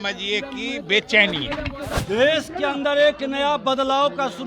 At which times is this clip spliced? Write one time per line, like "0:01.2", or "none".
0:02.0